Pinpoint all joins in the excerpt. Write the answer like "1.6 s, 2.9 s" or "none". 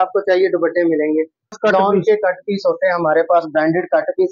1.6 s